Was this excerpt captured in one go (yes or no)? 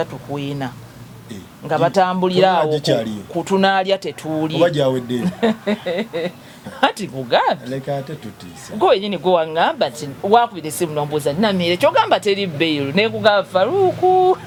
yes